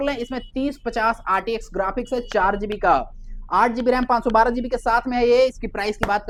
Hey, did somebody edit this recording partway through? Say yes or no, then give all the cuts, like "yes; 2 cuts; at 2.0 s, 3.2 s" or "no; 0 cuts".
no; 0 cuts